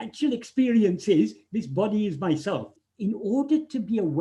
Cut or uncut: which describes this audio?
cut